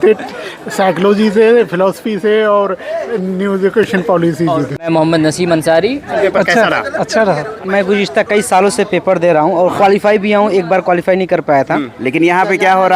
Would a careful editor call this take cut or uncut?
cut